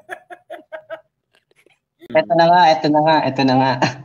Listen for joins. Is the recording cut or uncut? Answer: cut